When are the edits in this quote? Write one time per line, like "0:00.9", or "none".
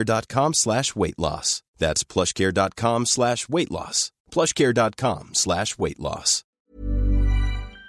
0:06.4

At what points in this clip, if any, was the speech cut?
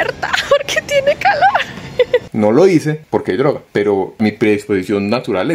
0:02.3
0:04.2

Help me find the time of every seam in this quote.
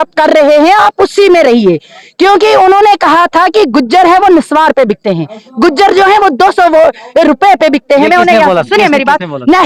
none

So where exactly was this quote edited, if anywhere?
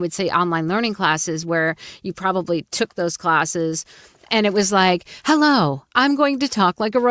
none

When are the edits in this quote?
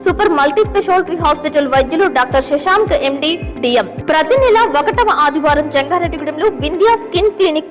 0:03.9

